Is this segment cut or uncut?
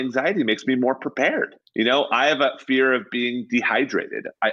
uncut